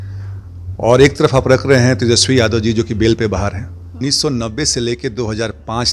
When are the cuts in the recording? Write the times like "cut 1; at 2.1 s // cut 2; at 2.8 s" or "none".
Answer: cut 1; at 3.8 s